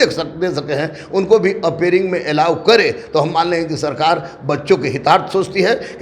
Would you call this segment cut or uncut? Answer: uncut